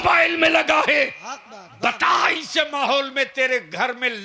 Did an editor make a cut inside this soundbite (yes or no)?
no